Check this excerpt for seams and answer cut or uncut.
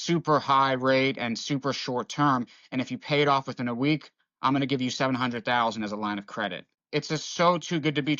cut